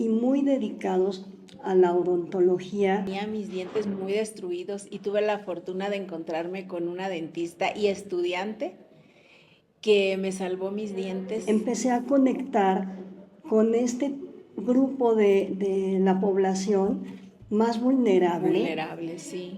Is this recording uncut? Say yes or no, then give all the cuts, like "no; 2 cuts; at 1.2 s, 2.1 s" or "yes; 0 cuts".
no; 2 cuts; at 3.1 s, 11.4 s